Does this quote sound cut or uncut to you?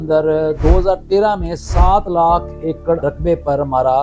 cut